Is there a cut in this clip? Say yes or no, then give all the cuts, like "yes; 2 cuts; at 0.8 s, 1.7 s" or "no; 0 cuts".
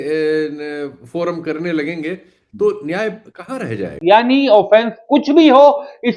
yes; 1 cut; at 4.0 s